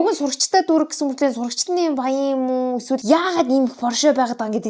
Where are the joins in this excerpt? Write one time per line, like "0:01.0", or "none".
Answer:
none

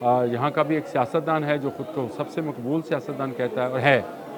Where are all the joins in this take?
none

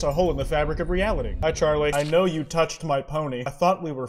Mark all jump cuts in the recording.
0:01.9

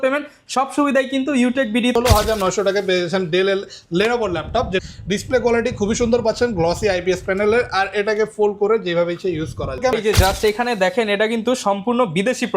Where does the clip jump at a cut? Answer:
0:02.0
0:04.8
0:09.9

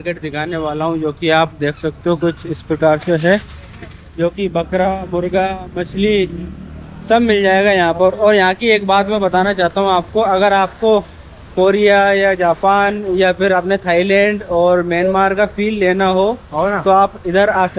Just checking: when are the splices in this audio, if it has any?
none

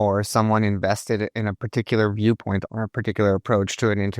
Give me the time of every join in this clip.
0:02.6

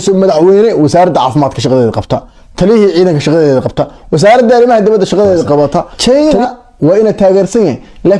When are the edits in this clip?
0:05.9

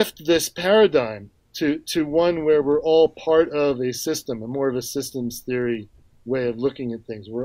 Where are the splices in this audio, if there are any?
none

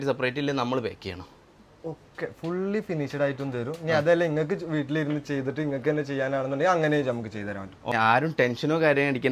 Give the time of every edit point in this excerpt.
0:07.9

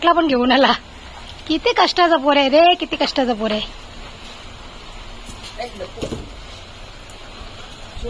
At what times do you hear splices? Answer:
none

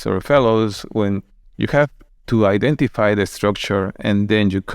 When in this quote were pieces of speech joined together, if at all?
0:01.4
0:02.1

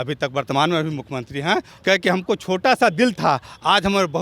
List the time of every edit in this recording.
0:01.7

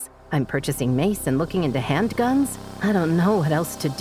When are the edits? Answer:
0:02.6

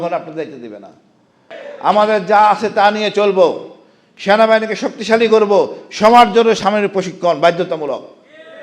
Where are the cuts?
0:01.6

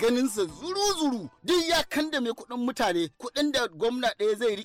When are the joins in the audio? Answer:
0:01.4

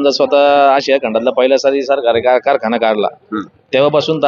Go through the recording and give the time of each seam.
none

